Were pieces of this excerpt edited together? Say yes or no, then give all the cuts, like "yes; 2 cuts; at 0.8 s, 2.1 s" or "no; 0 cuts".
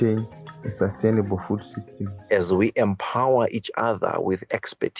yes; 1 cut; at 2.2 s